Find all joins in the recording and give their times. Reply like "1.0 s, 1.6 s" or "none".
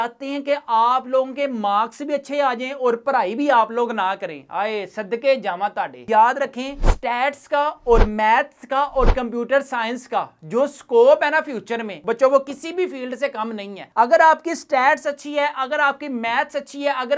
6.0 s